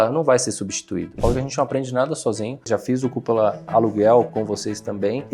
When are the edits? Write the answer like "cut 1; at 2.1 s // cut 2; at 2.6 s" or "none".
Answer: cut 1; at 1.1 s // cut 2; at 2.7 s // cut 3; at 3.7 s // cut 4; at 4.3 s